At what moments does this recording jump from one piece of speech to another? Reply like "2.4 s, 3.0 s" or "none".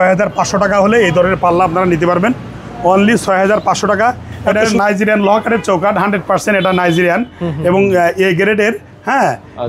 4.3 s

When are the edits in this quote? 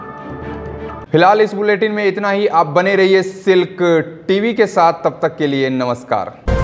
none

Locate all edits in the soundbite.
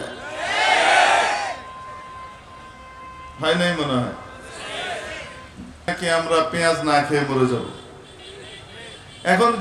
5.9 s

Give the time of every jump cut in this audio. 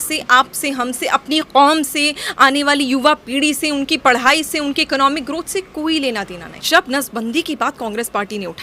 6.6 s

